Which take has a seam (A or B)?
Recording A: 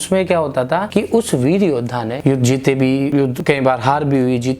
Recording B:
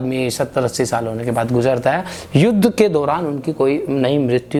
A